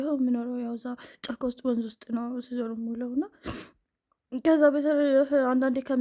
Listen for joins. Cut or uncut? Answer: uncut